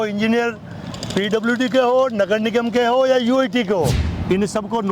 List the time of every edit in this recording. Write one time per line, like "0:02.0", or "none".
0:04.0